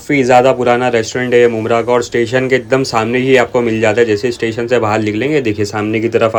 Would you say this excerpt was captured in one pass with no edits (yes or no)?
yes